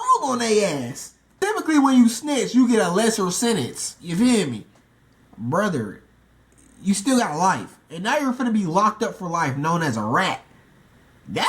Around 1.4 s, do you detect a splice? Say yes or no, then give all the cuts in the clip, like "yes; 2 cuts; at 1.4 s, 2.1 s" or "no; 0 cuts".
yes; 1 cut; at 1.4 s